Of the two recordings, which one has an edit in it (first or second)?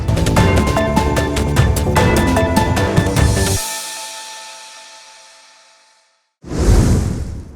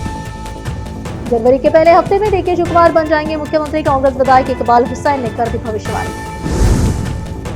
first